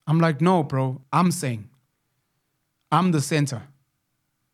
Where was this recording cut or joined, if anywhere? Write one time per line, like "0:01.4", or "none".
0:01.0

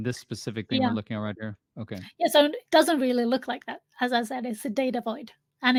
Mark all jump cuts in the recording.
none

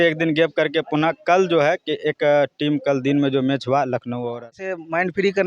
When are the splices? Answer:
0:04.5

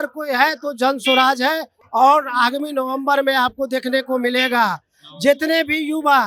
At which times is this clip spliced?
none

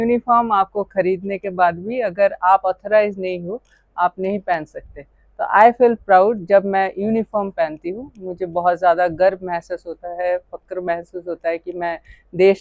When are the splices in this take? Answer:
none

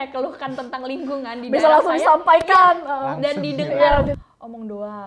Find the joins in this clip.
0:04.1

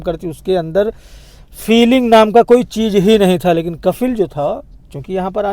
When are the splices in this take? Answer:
none

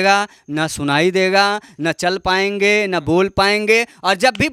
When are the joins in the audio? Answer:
none

